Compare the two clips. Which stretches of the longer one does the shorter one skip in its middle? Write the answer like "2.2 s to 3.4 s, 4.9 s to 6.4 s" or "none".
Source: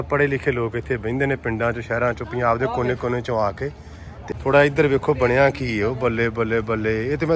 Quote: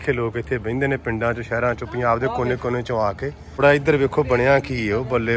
4.0 s to 4.5 s